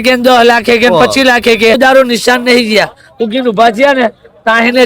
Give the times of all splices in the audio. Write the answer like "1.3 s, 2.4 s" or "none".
1.8 s